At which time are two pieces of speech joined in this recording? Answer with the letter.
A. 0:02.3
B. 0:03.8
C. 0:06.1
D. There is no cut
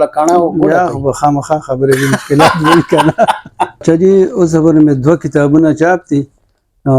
B